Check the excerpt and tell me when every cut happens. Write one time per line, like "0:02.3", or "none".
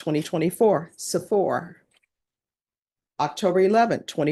none